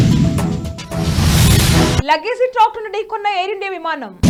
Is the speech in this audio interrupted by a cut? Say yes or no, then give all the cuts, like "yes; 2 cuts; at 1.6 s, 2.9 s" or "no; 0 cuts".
no; 0 cuts